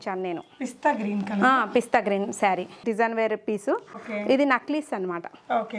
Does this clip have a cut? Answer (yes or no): yes